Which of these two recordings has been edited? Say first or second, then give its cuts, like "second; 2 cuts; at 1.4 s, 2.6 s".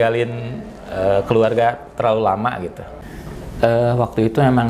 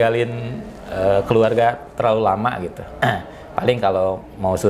first; 1 cut; at 2.9 s